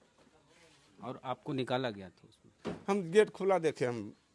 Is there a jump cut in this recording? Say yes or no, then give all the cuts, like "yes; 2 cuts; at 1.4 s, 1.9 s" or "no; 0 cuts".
yes; 1 cut; at 2.6 s